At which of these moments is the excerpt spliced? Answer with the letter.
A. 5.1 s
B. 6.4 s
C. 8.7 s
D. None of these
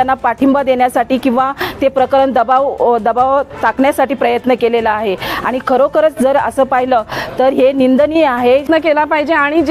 C